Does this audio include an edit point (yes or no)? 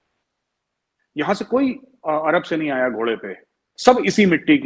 yes